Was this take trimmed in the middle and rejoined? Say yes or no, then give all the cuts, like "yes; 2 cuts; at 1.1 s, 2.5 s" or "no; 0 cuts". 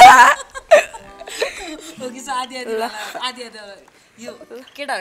no; 0 cuts